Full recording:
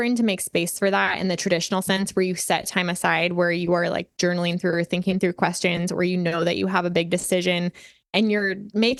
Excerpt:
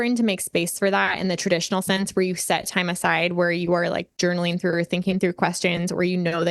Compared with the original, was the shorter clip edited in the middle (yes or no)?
no